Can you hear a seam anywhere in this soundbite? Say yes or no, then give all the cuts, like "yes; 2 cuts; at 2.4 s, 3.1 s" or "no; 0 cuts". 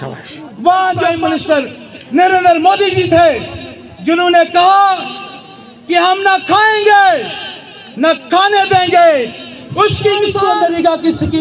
yes; 2 cuts; at 1.2 s, 10.4 s